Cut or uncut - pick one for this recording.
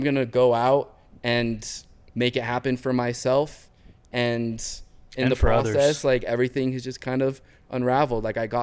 uncut